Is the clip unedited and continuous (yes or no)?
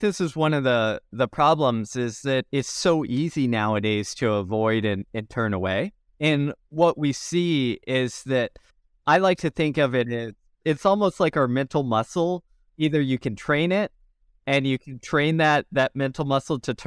yes